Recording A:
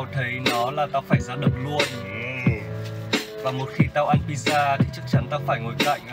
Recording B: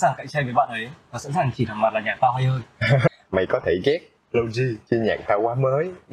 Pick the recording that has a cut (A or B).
B